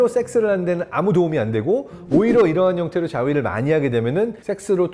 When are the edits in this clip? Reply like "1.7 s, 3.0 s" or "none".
none